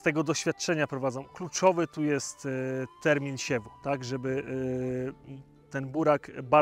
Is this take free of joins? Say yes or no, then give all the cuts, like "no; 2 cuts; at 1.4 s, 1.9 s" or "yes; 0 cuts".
yes; 0 cuts